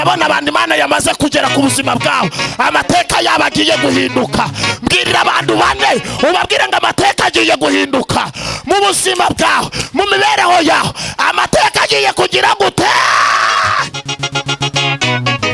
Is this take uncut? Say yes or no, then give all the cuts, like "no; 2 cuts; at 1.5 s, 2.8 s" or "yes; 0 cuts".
yes; 0 cuts